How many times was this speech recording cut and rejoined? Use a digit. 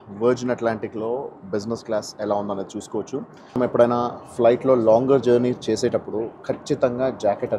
1